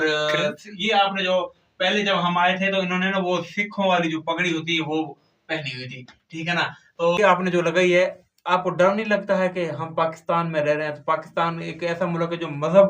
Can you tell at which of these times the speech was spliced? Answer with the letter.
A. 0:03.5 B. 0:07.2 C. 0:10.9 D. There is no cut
B